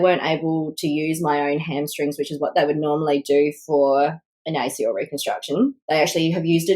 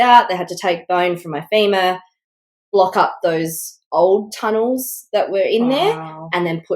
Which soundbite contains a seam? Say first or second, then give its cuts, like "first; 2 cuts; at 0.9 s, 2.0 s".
first; 1 cut; at 5.8 s